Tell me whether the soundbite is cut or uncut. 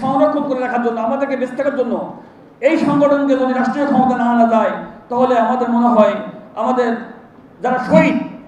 uncut